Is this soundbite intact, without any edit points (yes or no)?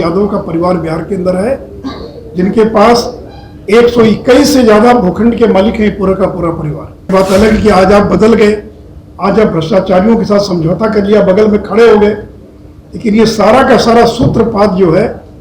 no